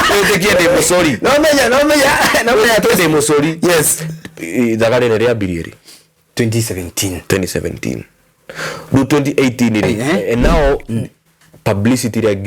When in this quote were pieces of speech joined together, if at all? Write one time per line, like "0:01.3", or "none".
0:09.9